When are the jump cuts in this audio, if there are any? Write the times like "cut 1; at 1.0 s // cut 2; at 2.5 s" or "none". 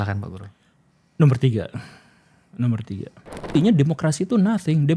cut 1; at 3.5 s